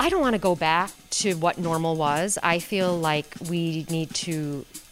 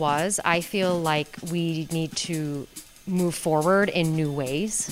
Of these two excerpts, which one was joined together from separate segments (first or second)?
first